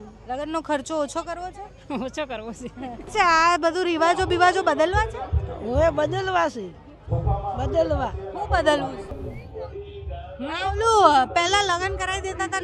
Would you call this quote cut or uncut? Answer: cut